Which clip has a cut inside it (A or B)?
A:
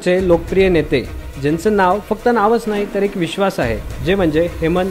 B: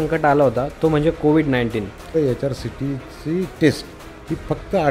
B